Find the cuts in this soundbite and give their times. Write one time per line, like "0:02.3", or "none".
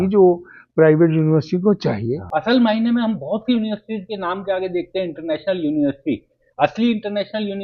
0:02.2